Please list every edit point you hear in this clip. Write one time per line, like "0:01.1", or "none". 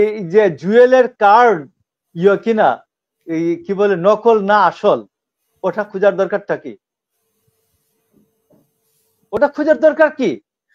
none